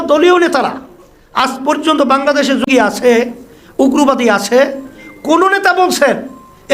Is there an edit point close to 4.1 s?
no; 1 cut; at 2.7 s

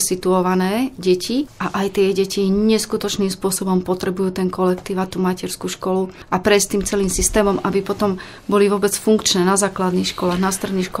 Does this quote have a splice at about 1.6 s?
yes; 1 cut; at 1.6 s

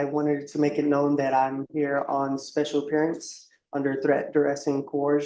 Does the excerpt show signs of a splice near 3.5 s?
no; 0 cuts

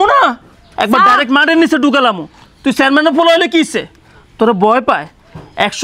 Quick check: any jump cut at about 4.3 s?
no; 0 cuts

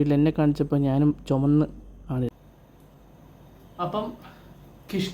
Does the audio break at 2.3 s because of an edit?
yes; 1 cut; at 2.3 s

